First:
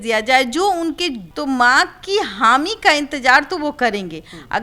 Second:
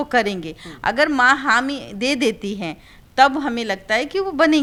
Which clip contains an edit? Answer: first; 1 cut; at 1.3 s

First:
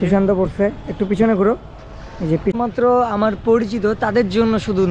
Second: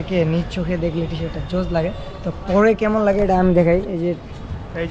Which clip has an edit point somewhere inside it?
first; 1 cut; at 2.5 s

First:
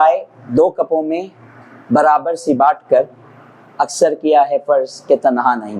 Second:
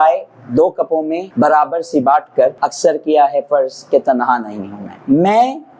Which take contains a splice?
second; 3 cuts; at 1.2 s, 2.6 s, 4.9 s

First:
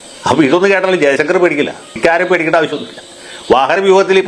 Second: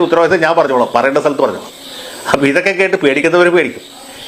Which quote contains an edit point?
first; 1 cut; at 1.8 s

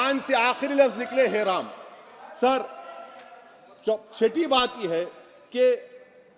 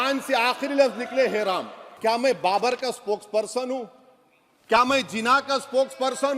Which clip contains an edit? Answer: second; 1 cut; at 1.8 s

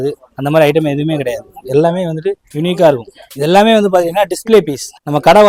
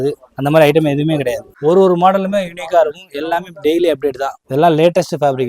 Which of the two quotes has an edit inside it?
second; 2 cuts; at 1.5 s, 4.3 s

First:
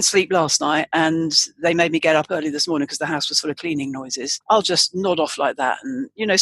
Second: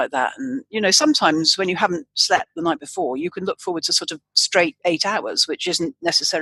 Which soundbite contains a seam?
first; 1 cut; at 4.3 s

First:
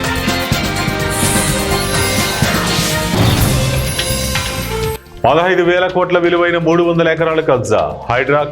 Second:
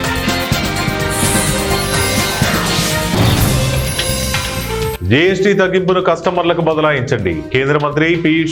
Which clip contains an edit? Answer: first; 2 cuts; at 1.3 s, 4.9 s

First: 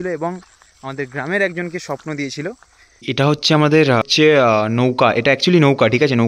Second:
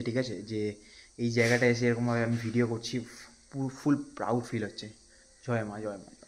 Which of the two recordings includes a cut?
first; 2 cuts; at 3.0 s, 4.0 s

